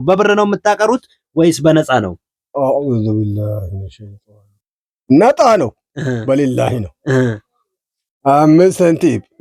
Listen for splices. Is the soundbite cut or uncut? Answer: uncut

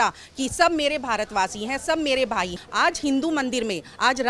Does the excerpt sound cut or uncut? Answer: cut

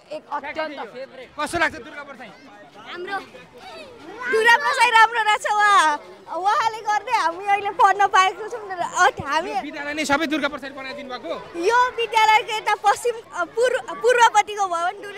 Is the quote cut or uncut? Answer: uncut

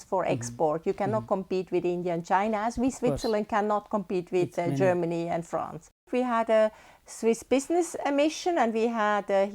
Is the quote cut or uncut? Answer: cut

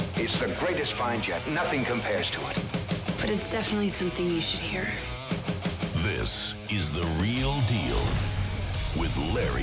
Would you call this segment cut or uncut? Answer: uncut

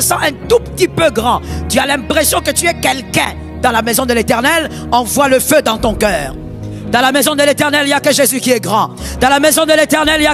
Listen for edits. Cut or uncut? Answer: uncut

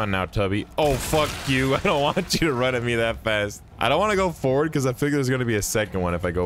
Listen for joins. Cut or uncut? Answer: cut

